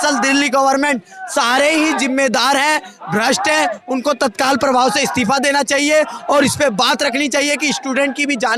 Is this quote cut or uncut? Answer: uncut